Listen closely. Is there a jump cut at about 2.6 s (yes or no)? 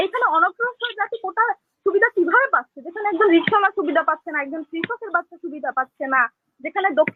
no